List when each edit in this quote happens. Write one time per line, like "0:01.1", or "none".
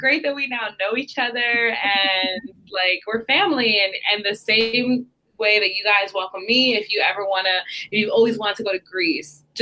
none